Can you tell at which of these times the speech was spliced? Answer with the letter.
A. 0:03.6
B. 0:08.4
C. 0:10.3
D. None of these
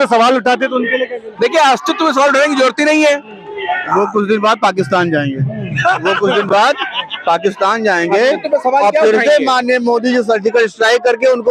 D